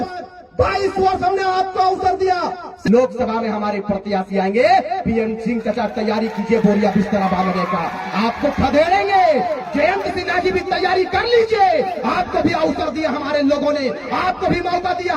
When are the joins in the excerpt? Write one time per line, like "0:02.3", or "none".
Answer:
0:02.7

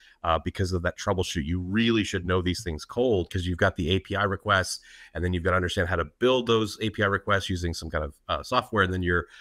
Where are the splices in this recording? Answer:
0:03.4

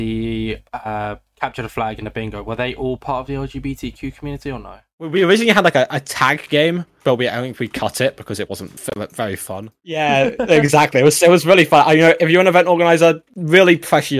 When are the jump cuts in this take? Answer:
0:05.1
0:09.9

